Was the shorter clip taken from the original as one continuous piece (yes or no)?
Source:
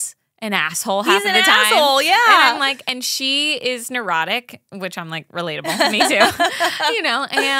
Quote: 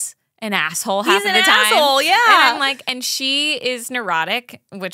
yes